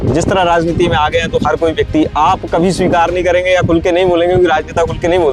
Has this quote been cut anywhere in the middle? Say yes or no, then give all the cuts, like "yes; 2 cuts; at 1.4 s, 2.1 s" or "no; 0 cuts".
no; 0 cuts